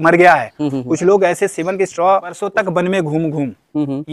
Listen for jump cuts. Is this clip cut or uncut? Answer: cut